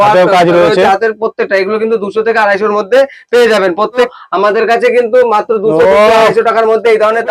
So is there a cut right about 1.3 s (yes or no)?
no